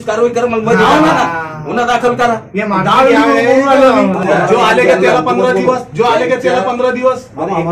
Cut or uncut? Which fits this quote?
cut